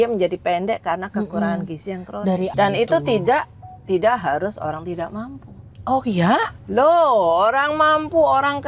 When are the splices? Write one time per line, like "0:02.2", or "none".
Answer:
0:02.5